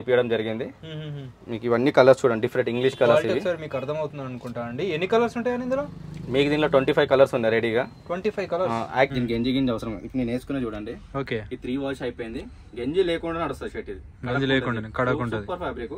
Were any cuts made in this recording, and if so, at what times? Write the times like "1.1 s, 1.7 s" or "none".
9.1 s

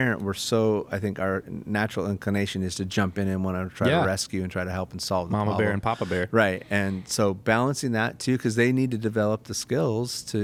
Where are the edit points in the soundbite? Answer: none

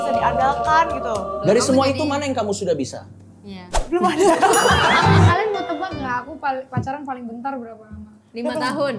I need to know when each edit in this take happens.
5.3 s

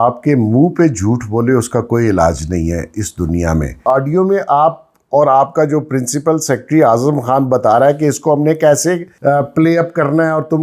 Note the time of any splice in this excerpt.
3.8 s, 9.1 s

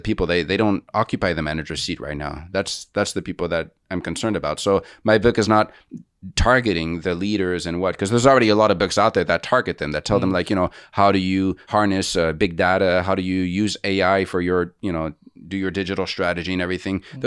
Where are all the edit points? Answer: 11.7 s

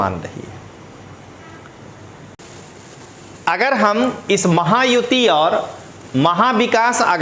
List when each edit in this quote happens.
2.4 s

